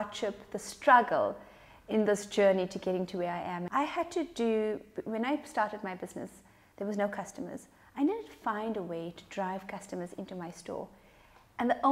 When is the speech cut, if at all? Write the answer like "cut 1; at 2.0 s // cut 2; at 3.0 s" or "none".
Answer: cut 1; at 3.6 s